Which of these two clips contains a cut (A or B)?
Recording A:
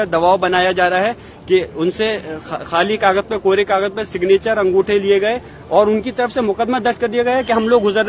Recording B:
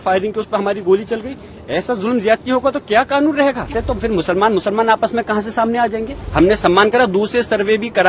B